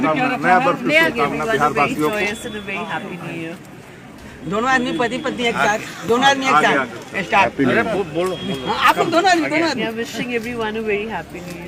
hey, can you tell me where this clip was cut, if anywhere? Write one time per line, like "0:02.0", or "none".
none